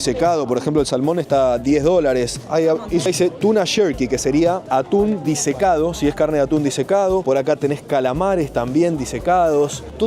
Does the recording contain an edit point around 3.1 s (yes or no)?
yes